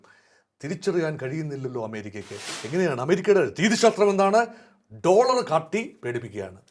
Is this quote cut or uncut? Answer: cut